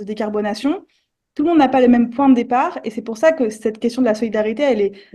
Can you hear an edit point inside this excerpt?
no; 0 cuts

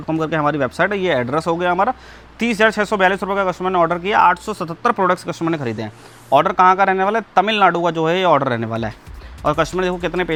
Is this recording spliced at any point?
no; 0 cuts

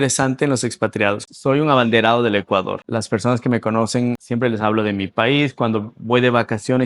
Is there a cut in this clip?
yes; 3 cuts; at 1.2 s, 2.8 s, 4.2 s

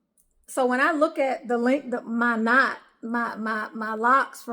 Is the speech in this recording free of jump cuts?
yes; 0 cuts

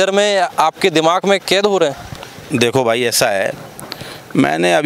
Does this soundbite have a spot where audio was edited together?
no; 0 cuts

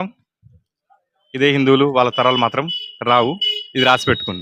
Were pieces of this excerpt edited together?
no; 0 cuts

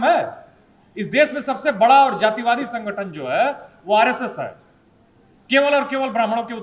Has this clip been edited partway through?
no; 0 cuts

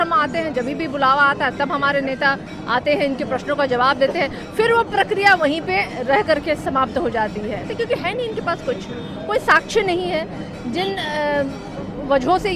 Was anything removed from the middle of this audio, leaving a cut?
yes; 1 cut; at 7.6 s

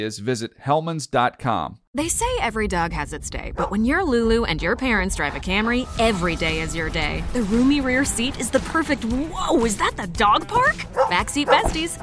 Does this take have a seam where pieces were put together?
yes; 1 cut; at 1.8 s

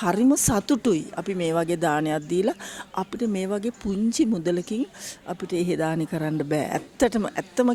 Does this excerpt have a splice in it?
no; 0 cuts

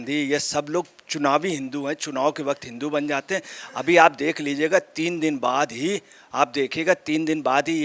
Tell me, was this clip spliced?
no; 0 cuts

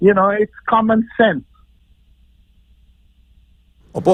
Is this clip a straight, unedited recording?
yes; 0 cuts

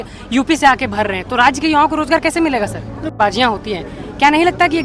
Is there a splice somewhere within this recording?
yes; 1 cut; at 3.1 s

